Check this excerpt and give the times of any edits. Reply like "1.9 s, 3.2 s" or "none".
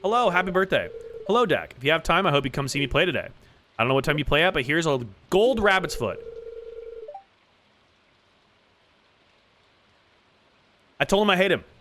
10.8 s